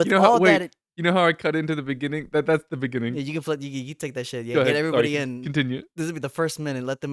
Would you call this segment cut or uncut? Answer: uncut